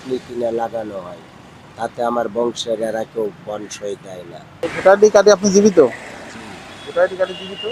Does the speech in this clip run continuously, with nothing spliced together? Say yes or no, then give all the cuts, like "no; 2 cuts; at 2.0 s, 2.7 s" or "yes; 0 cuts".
no; 1 cut; at 4.5 s